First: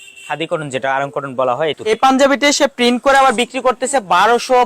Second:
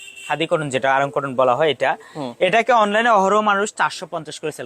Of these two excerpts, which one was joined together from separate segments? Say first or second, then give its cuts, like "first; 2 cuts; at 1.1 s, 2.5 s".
first; 1 cut; at 1.9 s